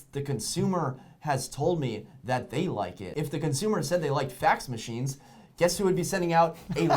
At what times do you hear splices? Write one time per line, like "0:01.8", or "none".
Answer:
0:03.0